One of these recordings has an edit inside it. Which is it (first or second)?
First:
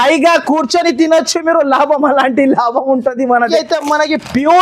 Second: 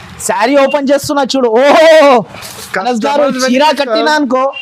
first